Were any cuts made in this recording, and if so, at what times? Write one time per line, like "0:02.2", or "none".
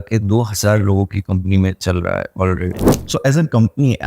0:02.9